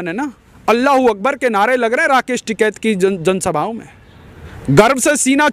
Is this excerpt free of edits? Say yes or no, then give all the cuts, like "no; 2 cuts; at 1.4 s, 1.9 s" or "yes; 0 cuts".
yes; 0 cuts